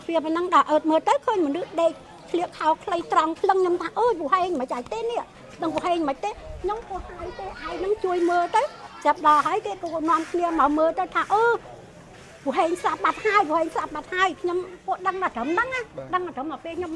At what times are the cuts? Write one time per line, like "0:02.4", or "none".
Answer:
none